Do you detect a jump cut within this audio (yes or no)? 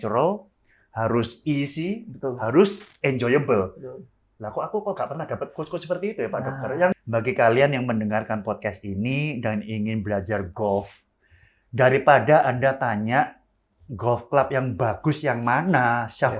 yes